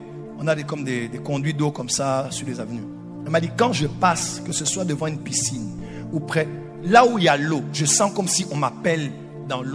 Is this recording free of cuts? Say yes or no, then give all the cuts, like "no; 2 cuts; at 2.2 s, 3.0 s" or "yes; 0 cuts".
yes; 0 cuts